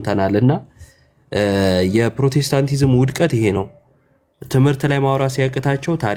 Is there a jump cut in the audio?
no; 0 cuts

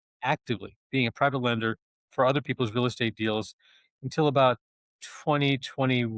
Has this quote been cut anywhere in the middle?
no; 0 cuts

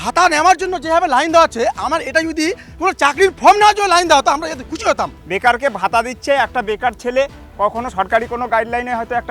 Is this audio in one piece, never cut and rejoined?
yes; 0 cuts

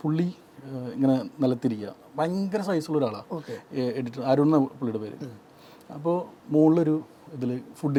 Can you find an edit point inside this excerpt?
no; 0 cuts

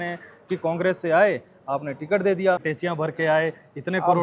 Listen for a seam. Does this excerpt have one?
yes; 1 cut; at 2.7 s

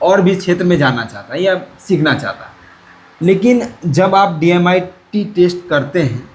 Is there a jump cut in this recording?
no; 0 cuts

